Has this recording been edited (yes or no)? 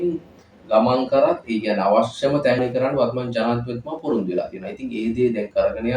yes